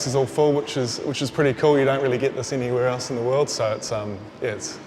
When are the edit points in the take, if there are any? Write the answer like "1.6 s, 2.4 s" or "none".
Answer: none